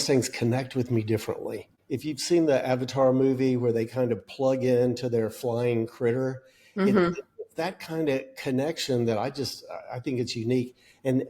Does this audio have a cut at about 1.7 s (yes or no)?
yes